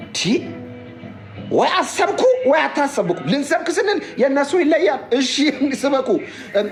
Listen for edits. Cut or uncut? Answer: uncut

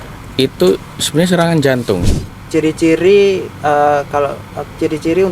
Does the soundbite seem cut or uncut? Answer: cut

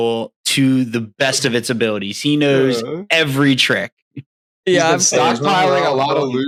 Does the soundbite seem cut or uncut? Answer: uncut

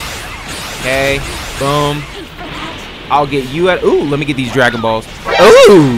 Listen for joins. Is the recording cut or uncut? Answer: uncut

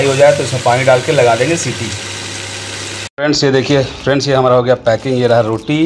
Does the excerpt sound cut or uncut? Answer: cut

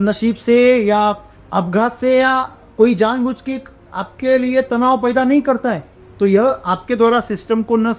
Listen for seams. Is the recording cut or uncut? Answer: cut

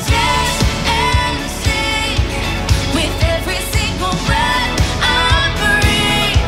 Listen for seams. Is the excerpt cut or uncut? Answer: uncut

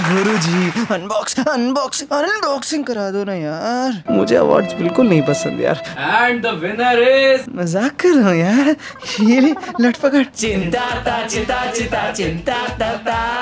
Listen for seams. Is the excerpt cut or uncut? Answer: uncut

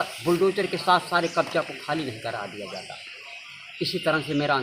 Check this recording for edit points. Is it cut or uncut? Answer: uncut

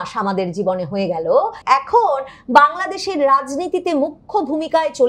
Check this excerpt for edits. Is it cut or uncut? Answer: cut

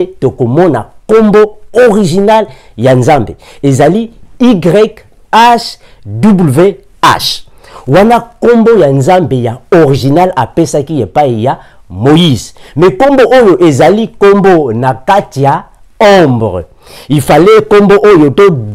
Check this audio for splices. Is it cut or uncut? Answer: uncut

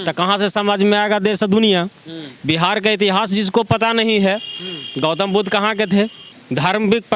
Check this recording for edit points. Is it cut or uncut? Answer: uncut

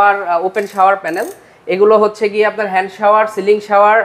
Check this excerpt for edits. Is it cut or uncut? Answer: uncut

